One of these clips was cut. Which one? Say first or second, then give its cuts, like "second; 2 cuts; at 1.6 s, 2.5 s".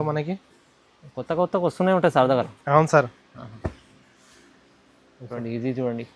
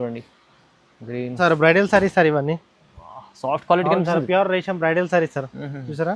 second; 1 cut; at 1.4 s